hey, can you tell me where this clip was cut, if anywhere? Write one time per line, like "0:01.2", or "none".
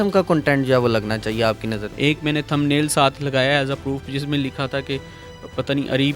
0:01.8